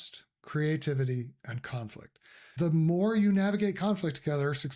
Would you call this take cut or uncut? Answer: cut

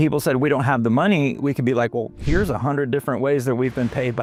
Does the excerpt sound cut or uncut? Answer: uncut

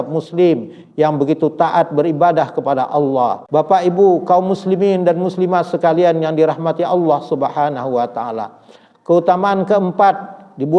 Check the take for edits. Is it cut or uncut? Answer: cut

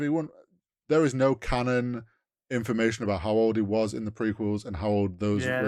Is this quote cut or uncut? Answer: uncut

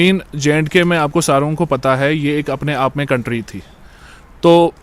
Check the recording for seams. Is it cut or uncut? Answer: uncut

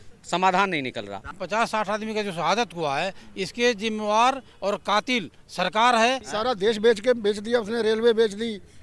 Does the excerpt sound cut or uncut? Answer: cut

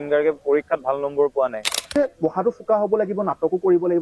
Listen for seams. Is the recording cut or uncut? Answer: cut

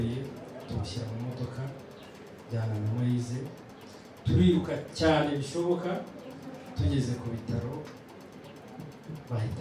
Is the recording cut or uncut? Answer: uncut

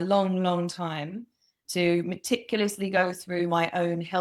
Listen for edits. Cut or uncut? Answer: cut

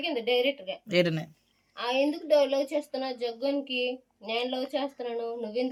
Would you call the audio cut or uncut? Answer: uncut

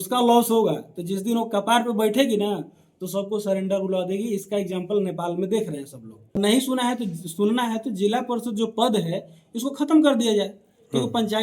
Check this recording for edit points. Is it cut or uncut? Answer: cut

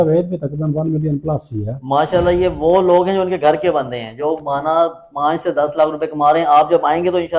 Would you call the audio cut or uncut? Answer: uncut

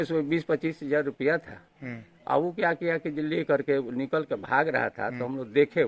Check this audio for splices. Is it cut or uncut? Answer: uncut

